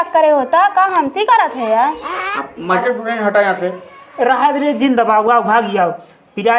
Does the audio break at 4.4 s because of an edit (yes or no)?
no